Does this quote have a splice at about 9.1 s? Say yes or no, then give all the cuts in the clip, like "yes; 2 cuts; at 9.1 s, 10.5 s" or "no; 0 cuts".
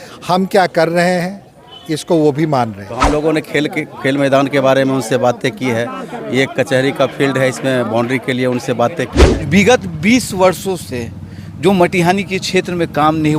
yes; 2 cuts; at 3.0 s, 9.1 s